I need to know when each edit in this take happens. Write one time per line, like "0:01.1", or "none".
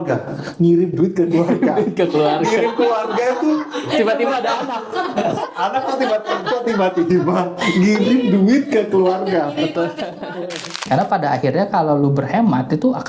0:10.8